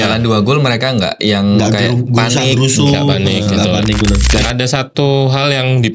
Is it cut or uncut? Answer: cut